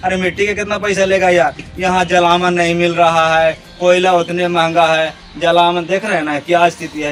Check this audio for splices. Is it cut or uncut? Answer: uncut